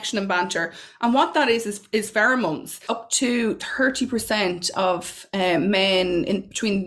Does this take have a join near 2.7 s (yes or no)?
yes